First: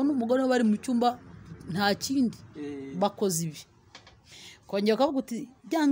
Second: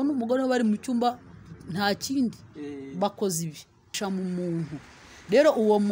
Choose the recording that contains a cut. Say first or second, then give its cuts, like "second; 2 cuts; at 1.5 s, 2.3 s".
second; 1 cut; at 4.0 s